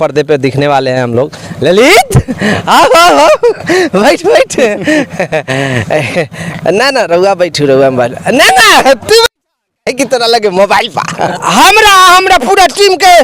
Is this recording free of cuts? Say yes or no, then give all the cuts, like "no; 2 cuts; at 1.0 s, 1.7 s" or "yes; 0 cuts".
no; 2 cuts; at 1.4 s, 11.3 s